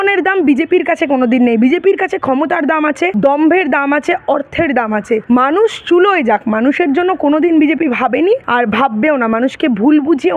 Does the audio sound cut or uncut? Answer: cut